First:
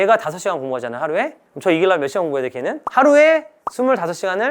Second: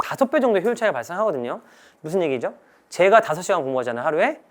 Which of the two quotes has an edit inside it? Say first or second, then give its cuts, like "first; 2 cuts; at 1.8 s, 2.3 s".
second; 1 cut; at 1.9 s